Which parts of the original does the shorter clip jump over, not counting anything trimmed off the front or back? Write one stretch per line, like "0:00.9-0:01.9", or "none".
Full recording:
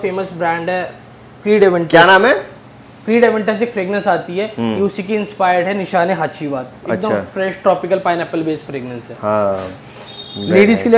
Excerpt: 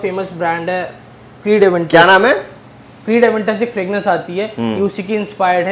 none